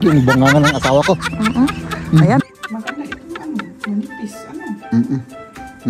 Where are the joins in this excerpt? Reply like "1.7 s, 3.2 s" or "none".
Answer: 2.4 s

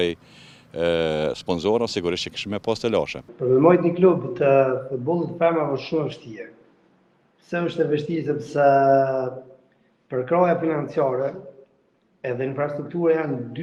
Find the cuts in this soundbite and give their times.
none

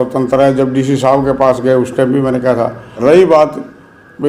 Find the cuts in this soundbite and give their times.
2.8 s

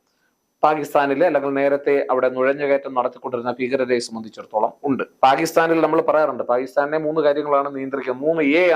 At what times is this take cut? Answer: 5.1 s

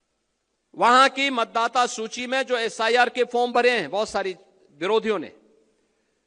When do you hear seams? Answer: none

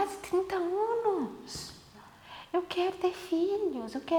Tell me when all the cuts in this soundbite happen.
none

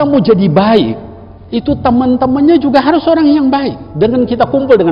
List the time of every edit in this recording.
3.8 s

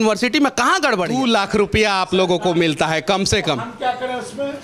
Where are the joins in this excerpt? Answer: 1.1 s

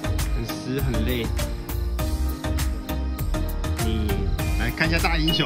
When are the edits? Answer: none

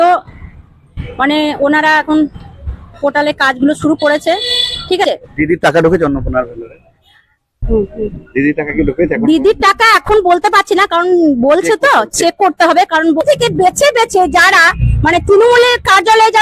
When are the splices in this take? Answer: 5.0 s, 13.2 s

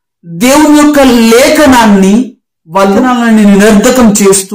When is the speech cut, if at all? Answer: 3.0 s

